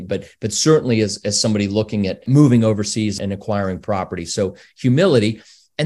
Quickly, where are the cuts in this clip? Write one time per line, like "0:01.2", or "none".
0:02.2
0:03.2